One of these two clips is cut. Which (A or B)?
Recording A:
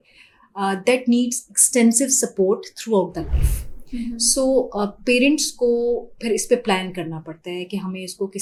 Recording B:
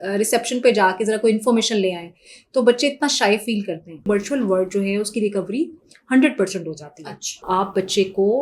B